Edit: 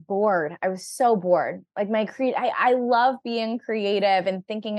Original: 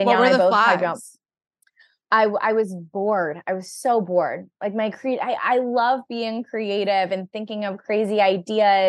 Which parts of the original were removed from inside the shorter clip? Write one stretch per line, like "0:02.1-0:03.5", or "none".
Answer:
none

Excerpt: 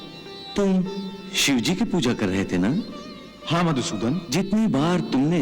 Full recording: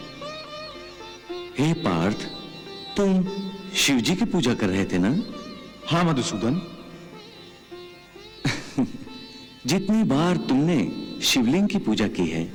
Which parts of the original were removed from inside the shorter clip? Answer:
0:06.7-0:09.6

